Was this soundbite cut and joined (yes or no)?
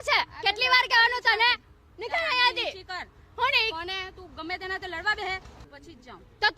yes